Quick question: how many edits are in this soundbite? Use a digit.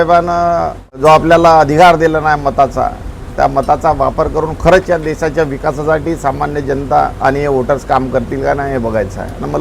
1